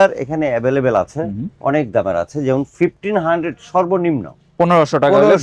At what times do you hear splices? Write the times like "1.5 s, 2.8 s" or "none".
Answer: none